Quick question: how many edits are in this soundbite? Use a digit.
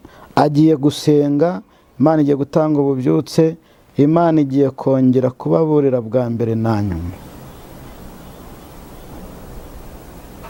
0